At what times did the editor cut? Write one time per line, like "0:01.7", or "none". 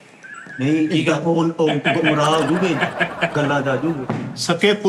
none